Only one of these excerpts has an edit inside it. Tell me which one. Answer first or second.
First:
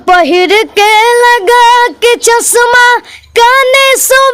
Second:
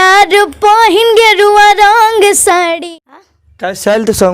second